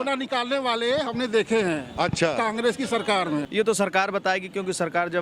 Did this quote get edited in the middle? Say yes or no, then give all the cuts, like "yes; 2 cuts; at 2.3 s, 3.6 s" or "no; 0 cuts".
yes; 1 cut; at 3.5 s